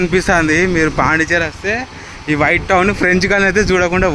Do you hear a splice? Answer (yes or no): no